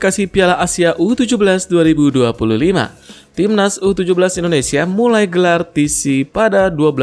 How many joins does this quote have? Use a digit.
0